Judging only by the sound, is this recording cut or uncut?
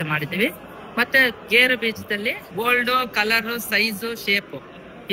cut